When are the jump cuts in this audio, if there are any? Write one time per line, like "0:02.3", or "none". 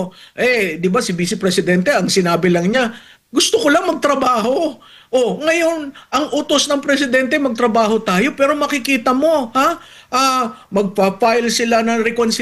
none